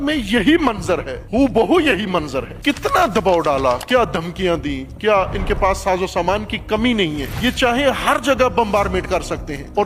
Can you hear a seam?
no; 0 cuts

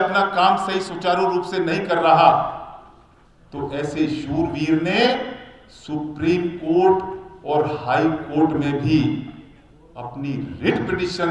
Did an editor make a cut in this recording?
no; 0 cuts

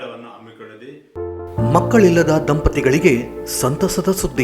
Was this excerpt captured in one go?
no; 1 cut; at 1.1 s

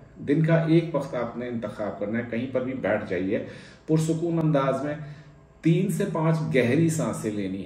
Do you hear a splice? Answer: no; 0 cuts

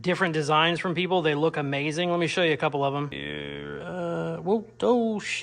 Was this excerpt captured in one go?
no; 1 cut; at 3.2 s

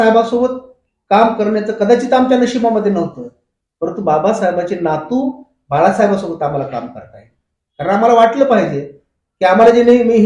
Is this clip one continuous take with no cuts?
yes; 0 cuts

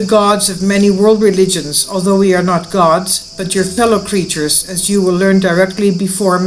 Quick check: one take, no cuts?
yes; 0 cuts

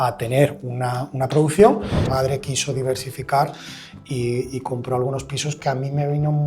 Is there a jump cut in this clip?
yes; 1 cut; at 2.0 s

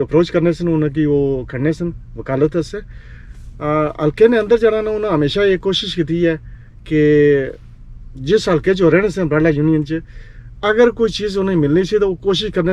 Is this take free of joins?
yes; 0 cuts

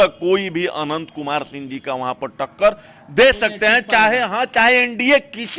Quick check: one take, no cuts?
yes; 0 cuts

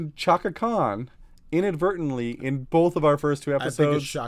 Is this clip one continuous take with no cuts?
yes; 0 cuts

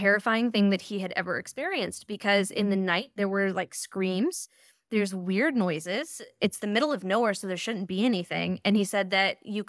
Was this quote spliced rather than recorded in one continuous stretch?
no; 0 cuts

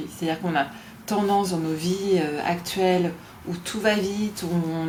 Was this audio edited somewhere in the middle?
no; 0 cuts

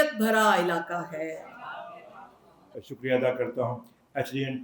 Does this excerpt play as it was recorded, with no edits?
no; 1 cut; at 2.8 s

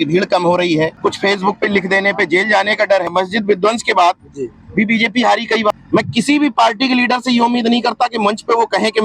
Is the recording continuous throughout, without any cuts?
no; 3 cuts; at 0.9 s, 3.1 s, 5.7 s

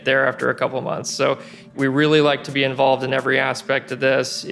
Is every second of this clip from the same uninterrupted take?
no; 1 cut; at 1.7 s

